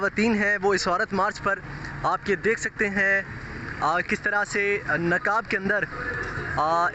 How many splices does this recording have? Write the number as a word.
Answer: zero